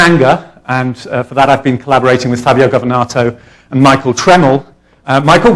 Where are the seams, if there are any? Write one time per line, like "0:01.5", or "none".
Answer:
none